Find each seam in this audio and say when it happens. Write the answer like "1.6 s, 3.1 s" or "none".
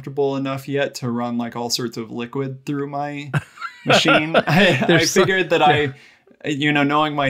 none